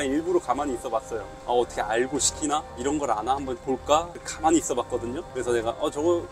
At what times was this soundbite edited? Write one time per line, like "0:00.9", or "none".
none